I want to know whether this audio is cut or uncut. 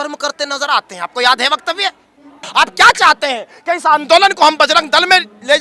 cut